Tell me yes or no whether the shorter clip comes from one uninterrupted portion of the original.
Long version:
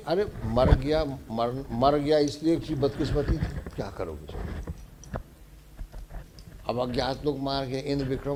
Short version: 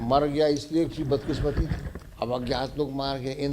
no